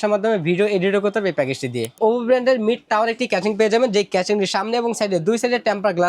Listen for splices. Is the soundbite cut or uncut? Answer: cut